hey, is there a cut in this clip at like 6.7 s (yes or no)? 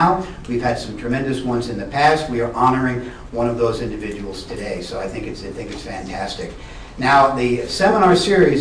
no